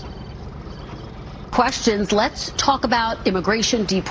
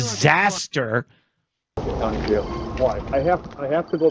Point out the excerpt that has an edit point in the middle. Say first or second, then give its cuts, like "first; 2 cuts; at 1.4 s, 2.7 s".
second; 1 cut; at 1.8 s